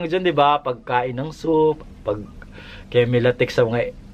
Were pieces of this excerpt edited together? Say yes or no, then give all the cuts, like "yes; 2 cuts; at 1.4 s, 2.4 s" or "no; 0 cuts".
no; 0 cuts